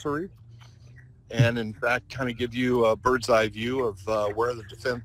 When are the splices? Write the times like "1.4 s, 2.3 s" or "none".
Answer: none